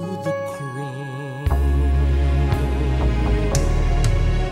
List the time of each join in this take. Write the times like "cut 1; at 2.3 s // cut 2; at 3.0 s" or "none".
none